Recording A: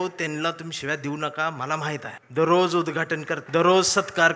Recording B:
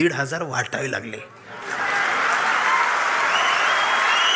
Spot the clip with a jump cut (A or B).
A